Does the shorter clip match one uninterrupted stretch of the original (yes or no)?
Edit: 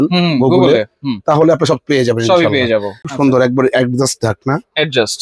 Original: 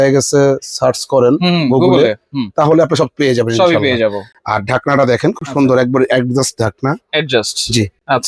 no